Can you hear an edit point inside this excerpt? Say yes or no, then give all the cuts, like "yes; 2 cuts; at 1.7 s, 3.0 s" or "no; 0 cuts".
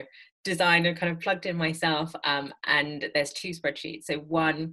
no; 0 cuts